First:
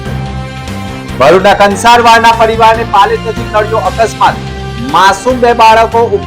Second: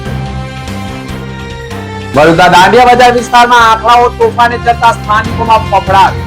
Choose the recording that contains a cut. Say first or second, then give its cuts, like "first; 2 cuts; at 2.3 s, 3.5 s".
second; 1 cut; at 1.2 s